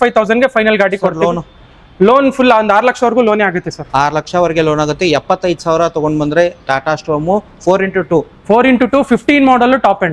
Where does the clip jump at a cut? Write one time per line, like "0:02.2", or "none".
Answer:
none